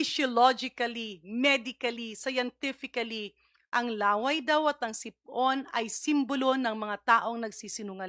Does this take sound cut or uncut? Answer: uncut